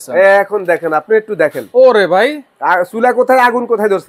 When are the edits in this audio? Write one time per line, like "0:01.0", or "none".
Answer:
0:01.0

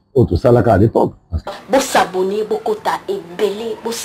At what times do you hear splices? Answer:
0:01.3

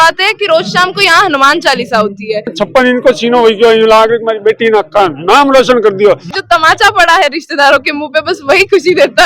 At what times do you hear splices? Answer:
0:02.5
0:06.3

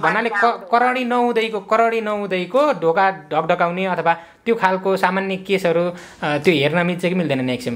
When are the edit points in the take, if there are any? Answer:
none

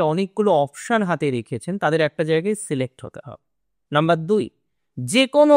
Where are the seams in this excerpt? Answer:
none

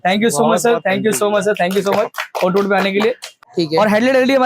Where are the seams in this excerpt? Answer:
0:03.5

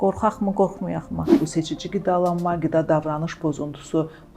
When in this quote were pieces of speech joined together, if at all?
0:01.4

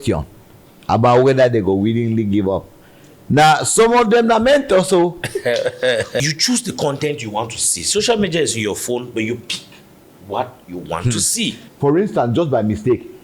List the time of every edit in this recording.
0:06.1
0:11.6

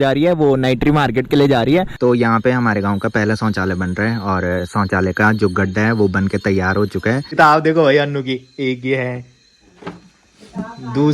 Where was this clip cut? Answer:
0:01.9
0:07.3

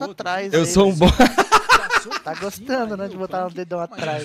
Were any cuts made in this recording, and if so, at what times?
none

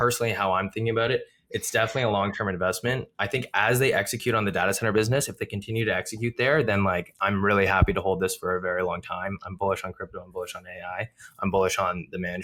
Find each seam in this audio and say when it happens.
none

